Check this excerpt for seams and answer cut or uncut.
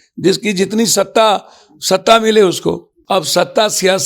cut